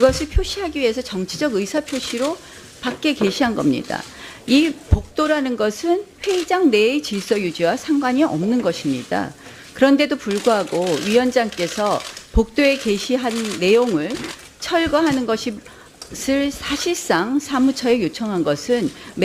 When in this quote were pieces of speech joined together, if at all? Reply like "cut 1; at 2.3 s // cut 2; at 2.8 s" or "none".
cut 1; at 15.7 s